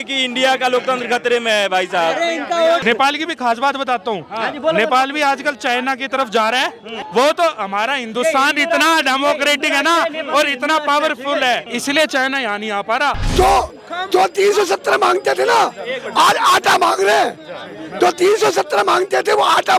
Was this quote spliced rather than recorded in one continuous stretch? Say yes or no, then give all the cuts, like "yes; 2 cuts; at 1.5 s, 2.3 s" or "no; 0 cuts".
yes; 4 cuts; at 2.8 s, 7.0 s, 11.7 s, 13.2 s